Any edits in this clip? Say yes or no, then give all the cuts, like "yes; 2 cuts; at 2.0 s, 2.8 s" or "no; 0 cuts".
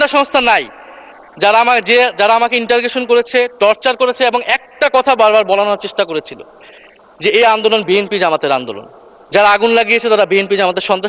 no; 0 cuts